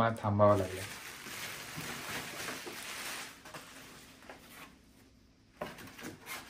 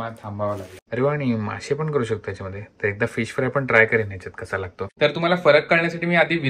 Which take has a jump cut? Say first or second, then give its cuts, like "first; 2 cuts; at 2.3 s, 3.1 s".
second; 2 cuts; at 0.8 s, 4.8 s